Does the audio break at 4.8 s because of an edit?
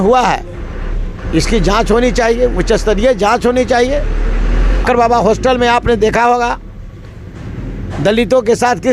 yes; 1 cut; at 4.8 s

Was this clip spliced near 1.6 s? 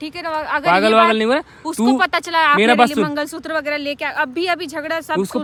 no; 0 cuts

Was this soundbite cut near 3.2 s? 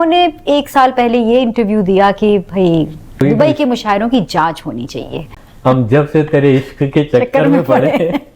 yes; 2 cuts; at 3.2 s, 5.3 s

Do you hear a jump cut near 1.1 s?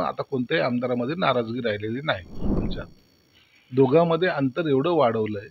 no; 1 cut; at 2.6 s

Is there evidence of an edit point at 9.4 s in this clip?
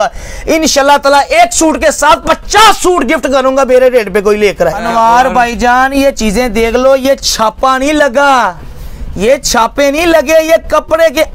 no; 1 cut; at 4.8 s

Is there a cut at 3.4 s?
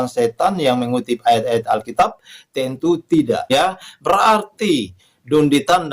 yes; 1 cut; at 3.4 s

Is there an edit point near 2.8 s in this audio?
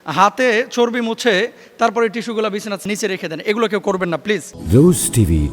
yes; 2 cuts; at 2.8 s, 4.5 s

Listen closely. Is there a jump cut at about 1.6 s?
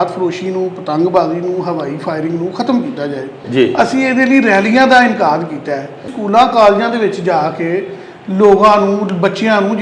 no; 2 cuts; at 3.4 s, 6.1 s

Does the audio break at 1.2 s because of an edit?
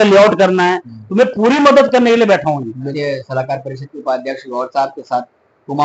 no; 1 cut; at 3.0 s

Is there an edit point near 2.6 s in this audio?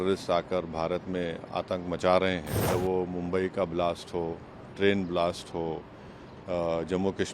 yes; 1 cut; at 2.6 s

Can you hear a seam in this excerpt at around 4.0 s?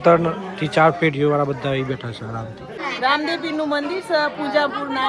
no; 1 cut; at 2.8 s

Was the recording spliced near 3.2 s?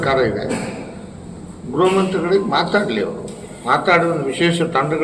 no; 0 cuts

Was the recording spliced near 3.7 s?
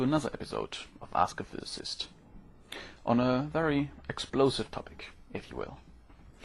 yes; 1 cut; at 3.7 s

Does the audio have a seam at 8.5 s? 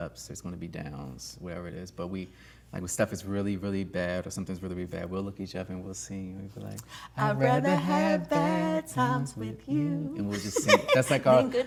no; 0 cuts

